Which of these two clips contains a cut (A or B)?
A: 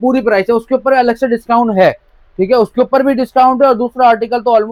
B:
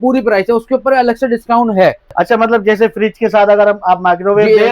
B